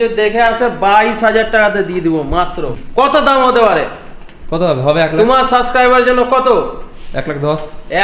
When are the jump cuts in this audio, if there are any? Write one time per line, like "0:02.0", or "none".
0:02.6